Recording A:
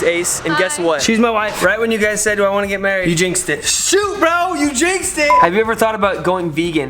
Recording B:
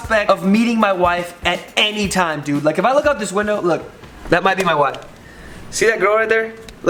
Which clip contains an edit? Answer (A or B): A